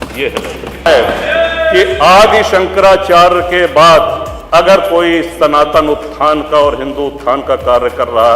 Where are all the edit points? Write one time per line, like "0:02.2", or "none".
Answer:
0:00.9
0:04.3